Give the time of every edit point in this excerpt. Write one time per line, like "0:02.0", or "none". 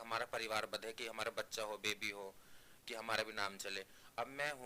none